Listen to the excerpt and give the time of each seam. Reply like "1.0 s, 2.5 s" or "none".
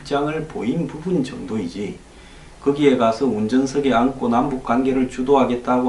1.0 s